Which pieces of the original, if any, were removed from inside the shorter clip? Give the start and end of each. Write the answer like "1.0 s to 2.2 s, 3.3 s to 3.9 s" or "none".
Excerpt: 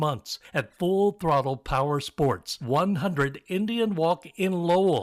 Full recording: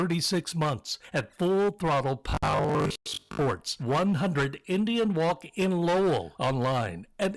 2.3 s to 2.9 s